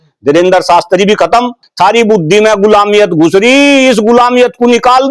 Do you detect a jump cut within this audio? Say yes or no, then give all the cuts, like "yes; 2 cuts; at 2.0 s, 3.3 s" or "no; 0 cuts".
yes; 1 cut; at 1.6 s